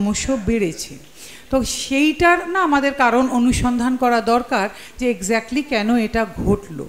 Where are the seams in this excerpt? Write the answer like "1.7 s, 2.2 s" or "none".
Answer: none

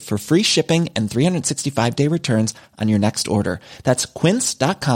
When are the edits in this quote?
none

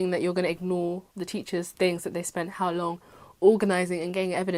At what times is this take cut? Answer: none

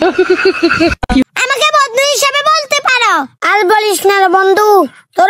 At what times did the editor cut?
1.0 s

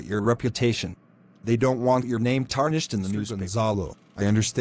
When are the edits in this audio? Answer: 3.4 s

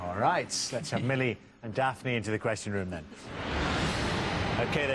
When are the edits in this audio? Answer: 2.4 s

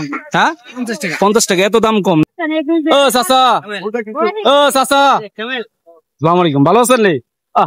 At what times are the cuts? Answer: 2.3 s

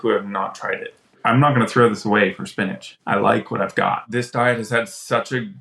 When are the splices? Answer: 1.2 s, 2.9 s, 4.1 s

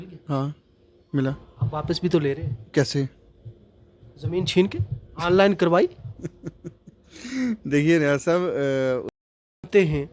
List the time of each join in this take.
9.1 s

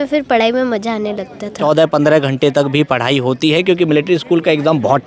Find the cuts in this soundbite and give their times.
1.5 s

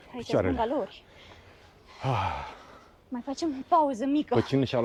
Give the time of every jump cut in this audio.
none

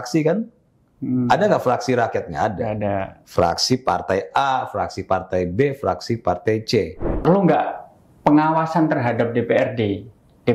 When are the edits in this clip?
7.2 s

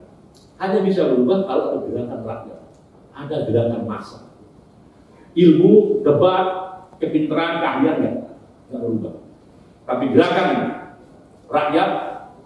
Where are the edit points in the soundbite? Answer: none

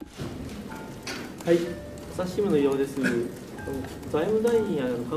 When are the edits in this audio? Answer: none

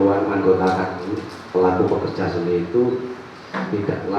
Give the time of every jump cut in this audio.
none

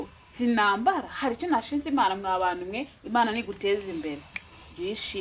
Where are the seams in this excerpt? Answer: none

